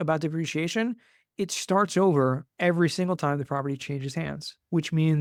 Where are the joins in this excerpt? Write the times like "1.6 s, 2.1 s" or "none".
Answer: none